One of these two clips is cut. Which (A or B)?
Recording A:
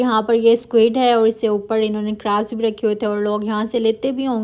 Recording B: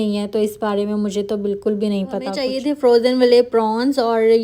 B